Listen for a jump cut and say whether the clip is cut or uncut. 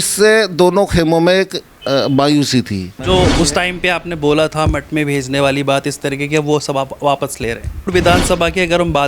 cut